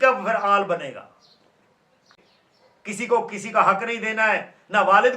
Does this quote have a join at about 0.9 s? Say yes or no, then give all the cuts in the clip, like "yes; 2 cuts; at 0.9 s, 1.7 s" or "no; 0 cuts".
no; 1 cut; at 2.3 s